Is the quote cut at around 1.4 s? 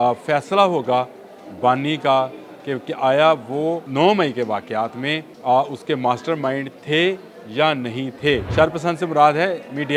no; 3 cuts; at 3.8 s, 5.3 s, 8.5 s

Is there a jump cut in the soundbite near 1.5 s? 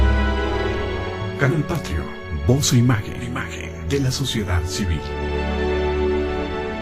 yes; 1 cut; at 1.5 s

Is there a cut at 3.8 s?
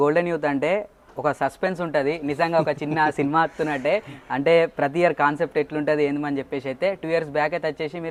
no; 0 cuts

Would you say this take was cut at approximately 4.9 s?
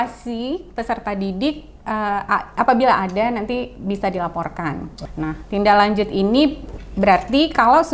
yes; 1 cut; at 4.9 s

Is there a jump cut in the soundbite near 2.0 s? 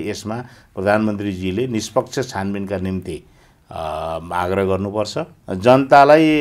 no; 1 cut; at 5.4 s

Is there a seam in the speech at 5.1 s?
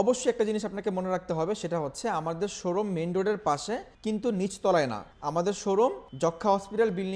no; 0 cuts

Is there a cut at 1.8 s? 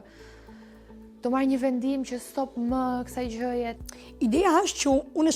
no; 1 cut; at 3.8 s

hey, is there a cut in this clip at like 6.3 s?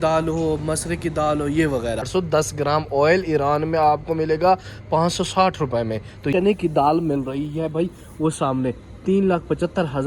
yes; 2 cuts; at 2.1 s, 6.3 s

